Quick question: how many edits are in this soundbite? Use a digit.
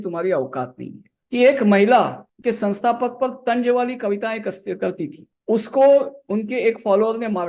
1